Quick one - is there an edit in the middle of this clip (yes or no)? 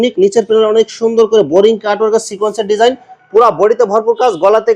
no